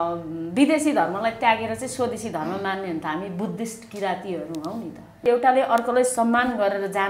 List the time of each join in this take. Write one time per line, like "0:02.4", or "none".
0:05.2